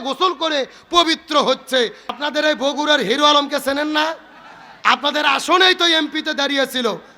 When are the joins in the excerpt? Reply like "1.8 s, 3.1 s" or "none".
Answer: 2.0 s